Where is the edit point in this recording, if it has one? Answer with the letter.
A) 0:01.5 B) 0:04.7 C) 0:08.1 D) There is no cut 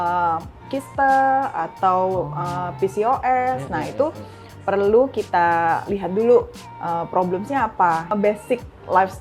C